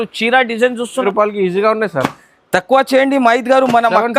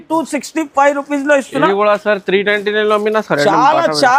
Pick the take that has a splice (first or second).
first